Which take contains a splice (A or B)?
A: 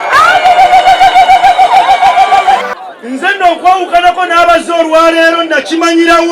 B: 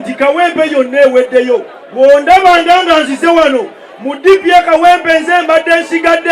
A